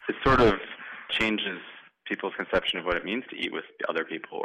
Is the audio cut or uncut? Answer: cut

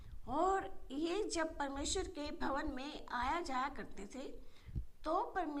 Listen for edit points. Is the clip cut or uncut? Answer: uncut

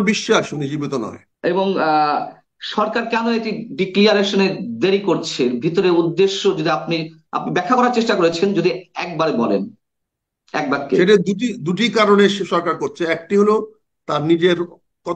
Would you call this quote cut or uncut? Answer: cut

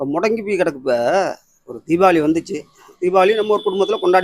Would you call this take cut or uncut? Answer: uncut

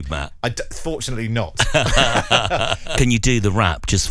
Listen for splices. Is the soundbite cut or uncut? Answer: cut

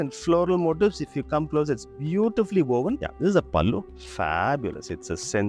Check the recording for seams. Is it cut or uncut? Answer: cut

